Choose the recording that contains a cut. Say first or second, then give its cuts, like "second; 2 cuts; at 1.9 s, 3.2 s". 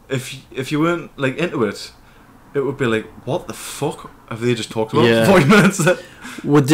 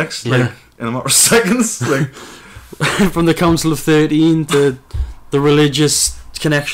second; 1 cut; at 4.5 s